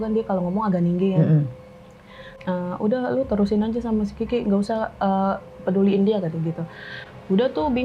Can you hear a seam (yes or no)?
yes